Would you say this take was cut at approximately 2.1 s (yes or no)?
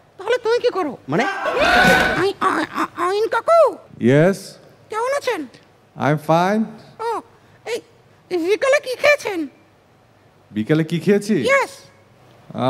yes